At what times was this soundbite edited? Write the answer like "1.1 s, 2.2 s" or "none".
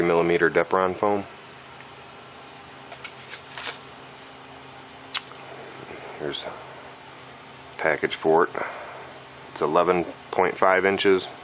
none

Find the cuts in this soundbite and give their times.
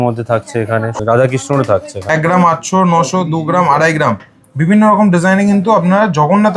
0.9 s, 2.1 s

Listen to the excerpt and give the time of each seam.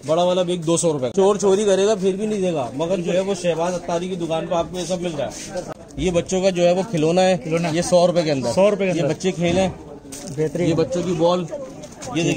1.1 s, 5.7 s

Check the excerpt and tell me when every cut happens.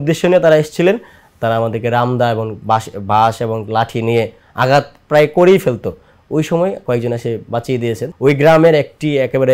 8.1 s

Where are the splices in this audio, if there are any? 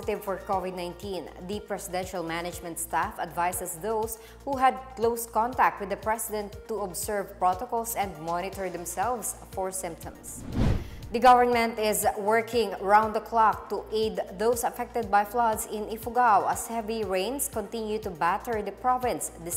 none

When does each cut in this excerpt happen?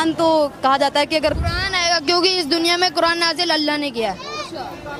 none

